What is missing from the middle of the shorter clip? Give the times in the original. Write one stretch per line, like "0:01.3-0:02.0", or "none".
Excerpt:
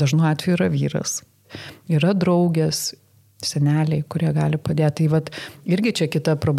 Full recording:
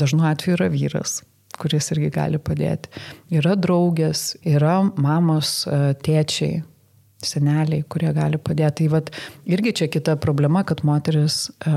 0:01.5-0:02.9
0:04.3-0:06.7